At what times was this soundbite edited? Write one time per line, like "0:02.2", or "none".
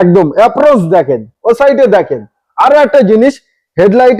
none